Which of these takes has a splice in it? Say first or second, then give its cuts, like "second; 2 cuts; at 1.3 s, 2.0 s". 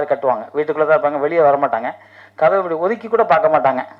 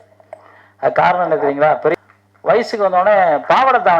second; 1 cut; at 1.9 s